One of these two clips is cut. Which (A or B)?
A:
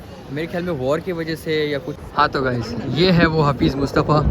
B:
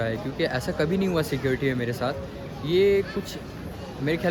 A